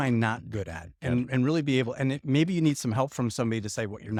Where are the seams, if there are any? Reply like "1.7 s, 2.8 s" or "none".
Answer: none